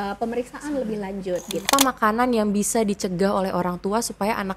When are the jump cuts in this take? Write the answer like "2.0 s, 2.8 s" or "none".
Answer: 1.7 s

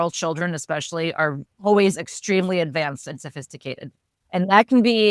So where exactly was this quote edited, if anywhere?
1.5 s

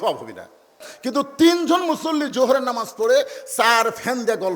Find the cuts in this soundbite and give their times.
0.9 s

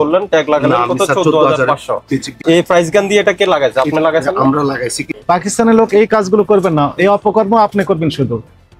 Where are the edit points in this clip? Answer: 2.3 s, 5.1 s

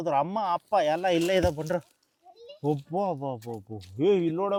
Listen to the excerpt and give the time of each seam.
none

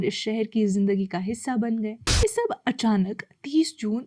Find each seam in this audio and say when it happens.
2.0 s

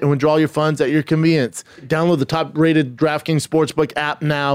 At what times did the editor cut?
1.9 s

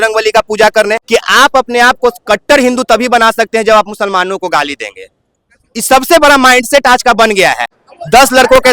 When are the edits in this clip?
1.0 s, 7.8 s

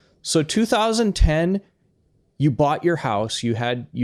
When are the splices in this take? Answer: none

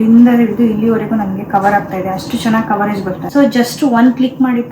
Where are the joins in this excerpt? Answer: 3.2 s

